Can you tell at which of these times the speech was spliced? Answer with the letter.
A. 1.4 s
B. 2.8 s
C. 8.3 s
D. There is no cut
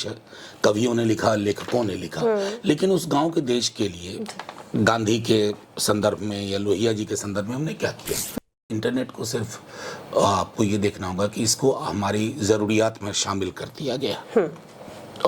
C